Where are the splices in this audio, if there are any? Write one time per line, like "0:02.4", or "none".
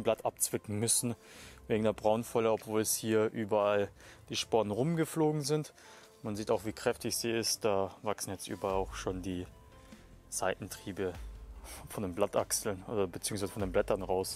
none